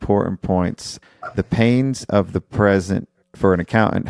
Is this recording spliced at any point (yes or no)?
yes